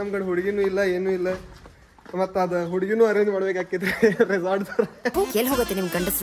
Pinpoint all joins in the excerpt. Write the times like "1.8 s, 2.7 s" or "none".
1.9 s, 5.1 s